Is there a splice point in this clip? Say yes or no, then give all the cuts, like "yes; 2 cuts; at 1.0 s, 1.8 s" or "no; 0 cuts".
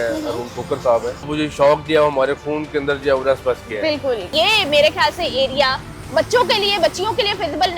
yes; 2 cuts; at 1.3 s, 4.3 s